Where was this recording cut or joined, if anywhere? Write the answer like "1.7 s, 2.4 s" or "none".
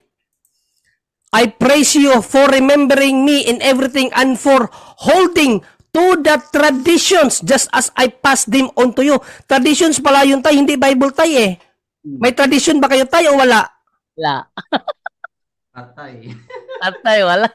none